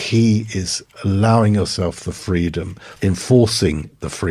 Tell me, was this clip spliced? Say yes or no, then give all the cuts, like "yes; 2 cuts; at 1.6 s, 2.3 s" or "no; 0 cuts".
yes; 1 cut; at 2.8 s